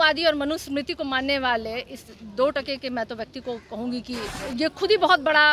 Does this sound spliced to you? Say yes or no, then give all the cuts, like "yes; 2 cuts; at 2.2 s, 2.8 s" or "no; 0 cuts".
yes; 1 cut; at 4.4 s